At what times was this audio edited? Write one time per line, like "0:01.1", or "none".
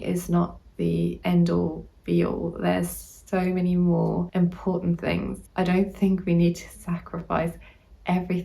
0:01.2
0:04.3
0:05.4